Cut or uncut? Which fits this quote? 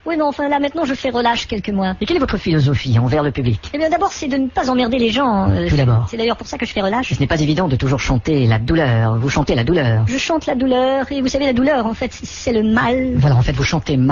uncut